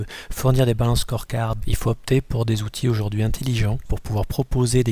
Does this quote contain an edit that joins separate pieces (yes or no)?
yes